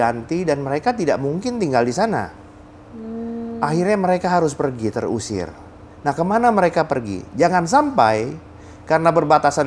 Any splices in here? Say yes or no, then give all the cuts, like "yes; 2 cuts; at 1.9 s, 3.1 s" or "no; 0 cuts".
no; 0 cuts